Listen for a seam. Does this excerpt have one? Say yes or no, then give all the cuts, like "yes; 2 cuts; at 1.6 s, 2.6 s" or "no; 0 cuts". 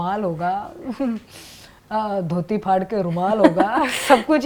no; 0 cuts